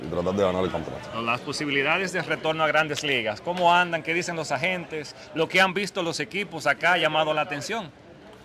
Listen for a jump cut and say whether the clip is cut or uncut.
cut